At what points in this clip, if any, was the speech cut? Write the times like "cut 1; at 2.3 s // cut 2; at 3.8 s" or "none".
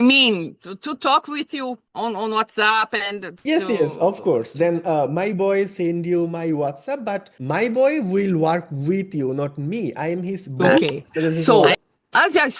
cut 1; at 11.4 s